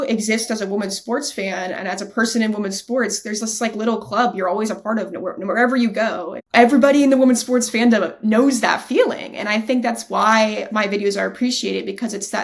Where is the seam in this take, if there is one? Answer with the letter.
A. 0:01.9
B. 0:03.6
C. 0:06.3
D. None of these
C